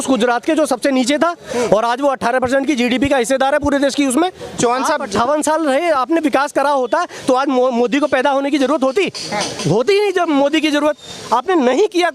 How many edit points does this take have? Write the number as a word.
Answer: one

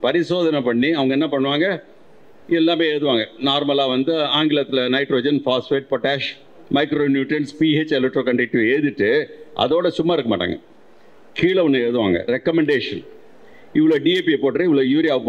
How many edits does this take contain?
zero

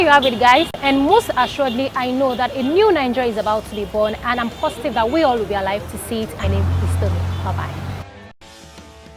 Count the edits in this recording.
one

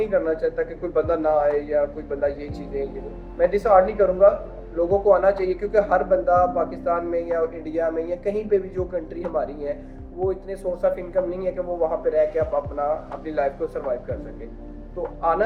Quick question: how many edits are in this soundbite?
zero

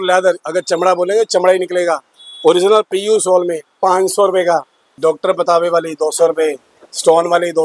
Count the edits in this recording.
one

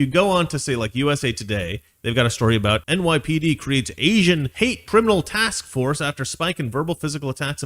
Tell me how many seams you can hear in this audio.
two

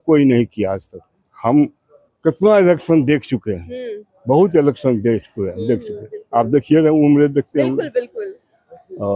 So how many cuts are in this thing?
zero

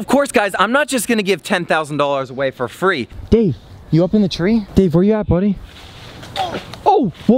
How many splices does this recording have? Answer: two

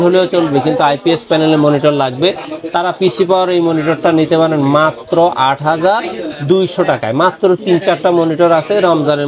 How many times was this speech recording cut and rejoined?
zero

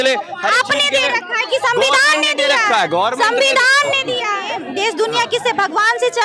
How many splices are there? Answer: one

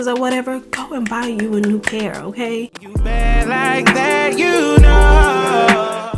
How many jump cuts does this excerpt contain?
one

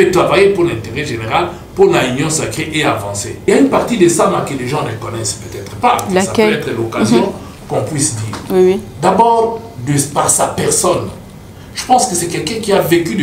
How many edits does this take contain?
one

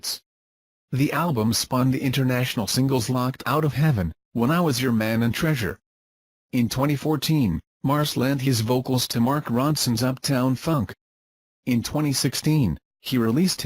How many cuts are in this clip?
one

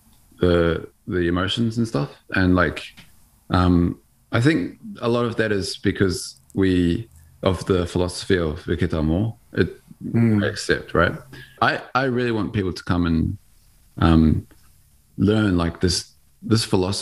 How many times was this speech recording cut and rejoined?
one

